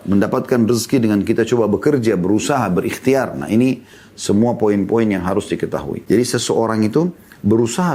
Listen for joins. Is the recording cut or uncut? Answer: cut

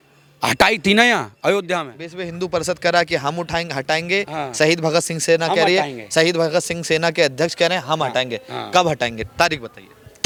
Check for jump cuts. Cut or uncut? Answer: uncut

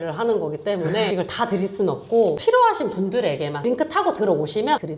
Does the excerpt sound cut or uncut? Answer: cut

